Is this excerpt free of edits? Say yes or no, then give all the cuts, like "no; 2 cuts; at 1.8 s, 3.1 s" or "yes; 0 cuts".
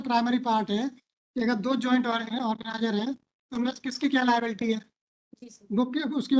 yes; 0 cuts